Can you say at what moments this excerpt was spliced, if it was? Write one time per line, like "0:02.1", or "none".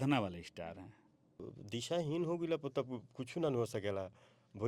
0:01.4